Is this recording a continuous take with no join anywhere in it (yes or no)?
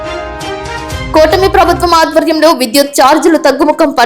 no